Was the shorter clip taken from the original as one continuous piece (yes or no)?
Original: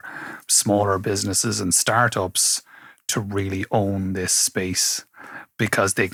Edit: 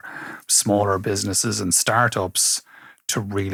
yes